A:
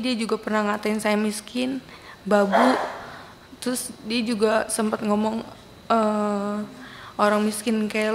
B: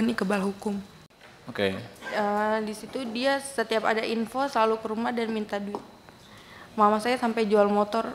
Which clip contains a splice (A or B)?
B